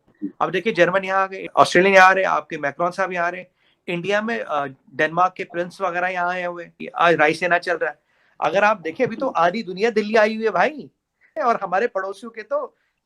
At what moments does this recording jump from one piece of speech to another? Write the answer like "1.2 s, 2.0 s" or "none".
11.4 s